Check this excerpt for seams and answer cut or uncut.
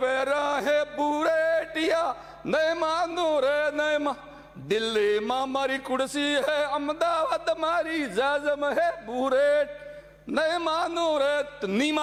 uncut